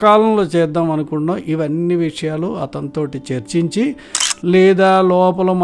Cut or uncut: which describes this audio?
cut